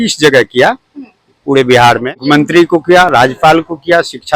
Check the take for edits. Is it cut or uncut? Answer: cut